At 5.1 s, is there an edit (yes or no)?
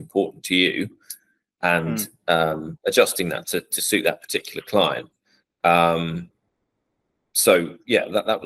no